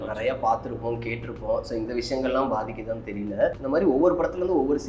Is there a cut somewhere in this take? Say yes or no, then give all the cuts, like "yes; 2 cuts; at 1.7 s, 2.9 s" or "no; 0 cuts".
yes; 1 cut; at 3.5 s